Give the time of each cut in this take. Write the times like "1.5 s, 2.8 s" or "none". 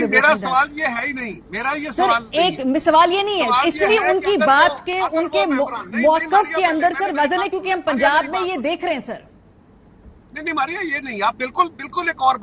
none